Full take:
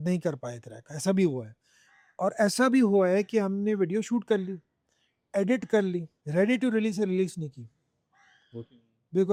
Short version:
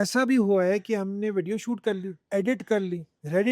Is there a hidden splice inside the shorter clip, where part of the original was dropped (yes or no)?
yes